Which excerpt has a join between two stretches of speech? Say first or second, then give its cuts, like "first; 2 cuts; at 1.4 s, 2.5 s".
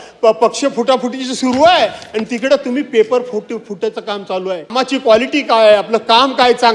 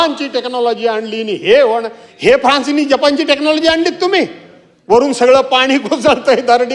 first; 1 cut; at 4.8 s